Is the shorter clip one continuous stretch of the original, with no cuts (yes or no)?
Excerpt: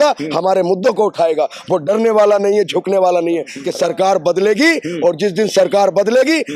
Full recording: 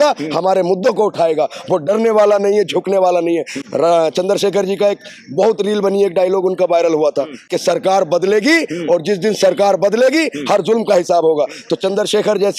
no